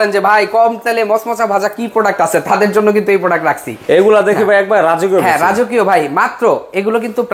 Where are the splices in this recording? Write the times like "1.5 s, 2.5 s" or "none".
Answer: none